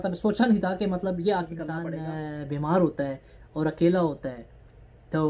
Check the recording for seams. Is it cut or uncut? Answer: cut